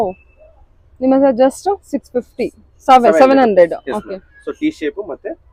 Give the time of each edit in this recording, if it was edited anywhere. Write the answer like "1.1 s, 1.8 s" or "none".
none